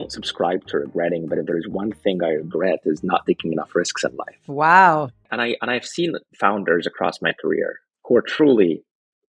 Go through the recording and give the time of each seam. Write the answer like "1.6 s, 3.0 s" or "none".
5.3 s, 7.9 s